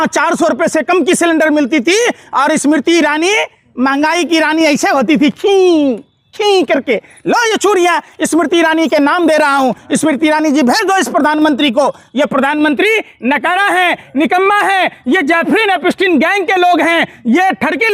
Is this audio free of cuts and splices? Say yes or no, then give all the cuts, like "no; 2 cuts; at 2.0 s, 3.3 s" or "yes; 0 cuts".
yes; 0 cuts